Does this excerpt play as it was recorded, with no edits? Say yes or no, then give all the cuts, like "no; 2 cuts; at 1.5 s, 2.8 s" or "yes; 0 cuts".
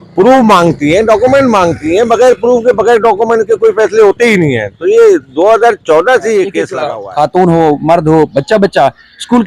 no; 1 cut; at 6.7 s